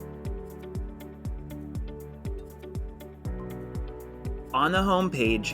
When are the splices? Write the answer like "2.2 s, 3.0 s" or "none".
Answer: 2.2 s, 4.4 s